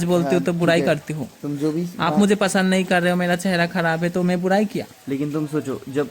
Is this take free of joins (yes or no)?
yes